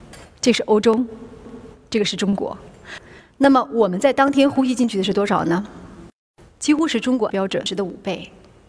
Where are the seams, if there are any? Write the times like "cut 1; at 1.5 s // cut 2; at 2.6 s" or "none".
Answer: none